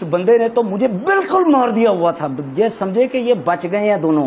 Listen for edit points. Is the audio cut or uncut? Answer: uncut